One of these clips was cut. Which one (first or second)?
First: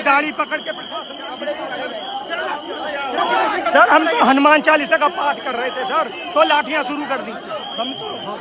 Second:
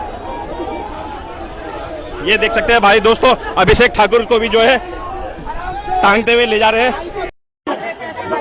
second